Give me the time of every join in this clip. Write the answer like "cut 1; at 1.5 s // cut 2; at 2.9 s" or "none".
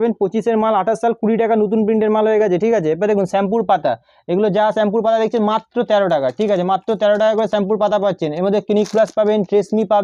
none